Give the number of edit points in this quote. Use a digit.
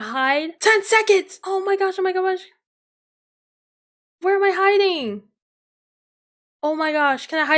0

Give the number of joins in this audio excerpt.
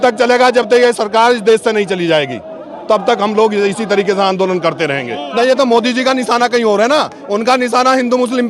1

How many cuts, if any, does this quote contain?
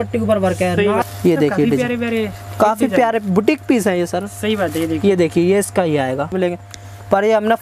2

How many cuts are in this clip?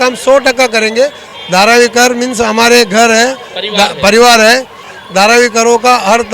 2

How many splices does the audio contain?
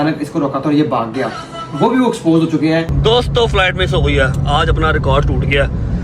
1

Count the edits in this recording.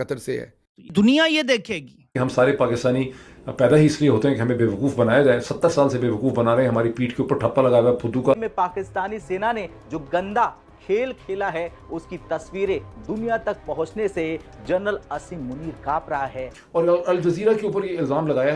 2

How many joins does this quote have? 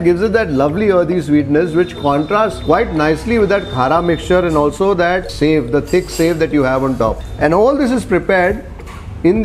2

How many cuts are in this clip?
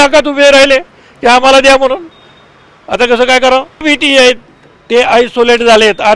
1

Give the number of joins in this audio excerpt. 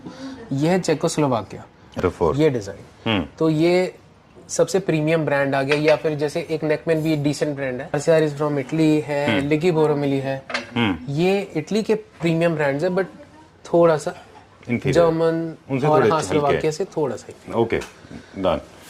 2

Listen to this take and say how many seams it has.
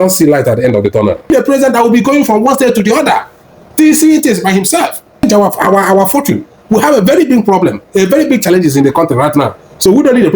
2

